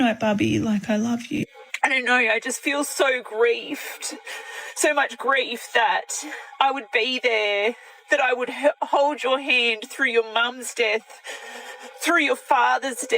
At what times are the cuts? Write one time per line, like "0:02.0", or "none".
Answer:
0:01.4